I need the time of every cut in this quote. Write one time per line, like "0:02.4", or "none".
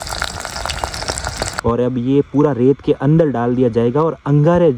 0:01.4

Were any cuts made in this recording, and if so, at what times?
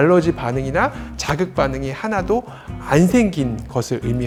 none

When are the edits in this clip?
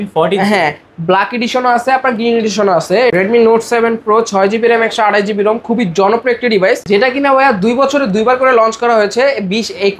0:03.1
0:06.8

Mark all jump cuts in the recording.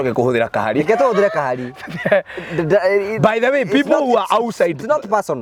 none

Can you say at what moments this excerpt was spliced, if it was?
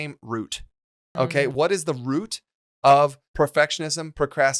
0:01.3
0:03.2

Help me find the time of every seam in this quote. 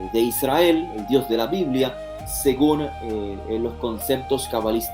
none

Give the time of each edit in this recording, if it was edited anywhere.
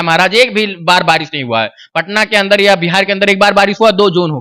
none

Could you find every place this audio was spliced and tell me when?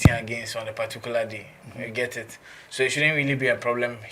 none

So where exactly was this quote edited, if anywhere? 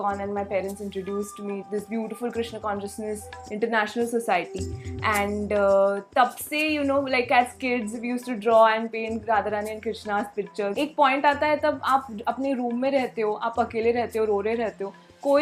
0:01.6
0:10.7

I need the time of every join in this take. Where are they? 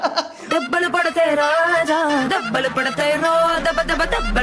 none

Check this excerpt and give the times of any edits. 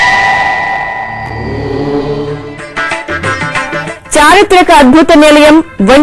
0:02.2

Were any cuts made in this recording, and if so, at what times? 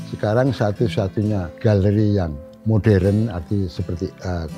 0:01.5
0:02.5

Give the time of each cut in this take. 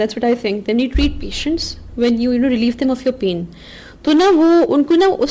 none

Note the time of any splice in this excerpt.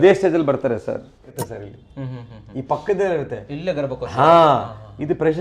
0:01.3

